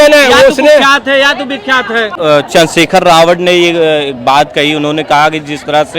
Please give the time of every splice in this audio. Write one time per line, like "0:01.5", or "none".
0:02.1